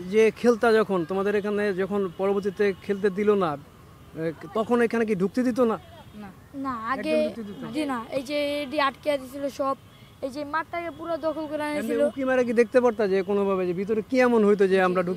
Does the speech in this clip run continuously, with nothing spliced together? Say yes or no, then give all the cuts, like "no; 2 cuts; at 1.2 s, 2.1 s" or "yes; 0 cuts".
yes; 0 cuts